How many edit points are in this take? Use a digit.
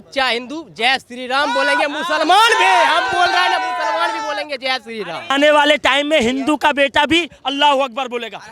1